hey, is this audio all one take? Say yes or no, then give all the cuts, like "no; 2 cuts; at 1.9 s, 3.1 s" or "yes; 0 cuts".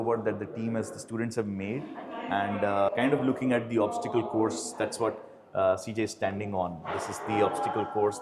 yes; 0 cuts